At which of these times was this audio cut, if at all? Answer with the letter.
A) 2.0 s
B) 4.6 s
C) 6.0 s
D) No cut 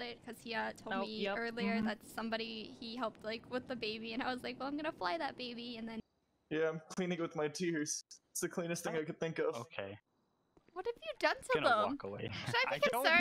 C